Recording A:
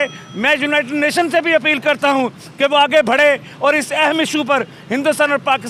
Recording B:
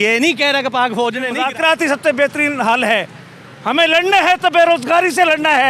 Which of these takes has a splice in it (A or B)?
B